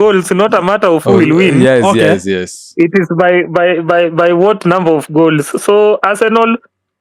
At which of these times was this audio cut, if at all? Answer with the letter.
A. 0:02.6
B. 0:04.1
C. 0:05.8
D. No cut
D